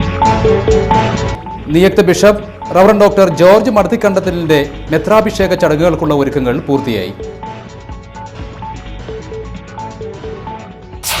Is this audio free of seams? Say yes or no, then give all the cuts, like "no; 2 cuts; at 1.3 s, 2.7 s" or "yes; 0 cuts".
yes; 0 cuts